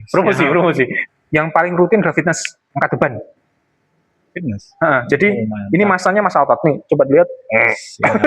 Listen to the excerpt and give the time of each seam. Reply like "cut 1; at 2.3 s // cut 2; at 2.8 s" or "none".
cut 1; at 1.0 s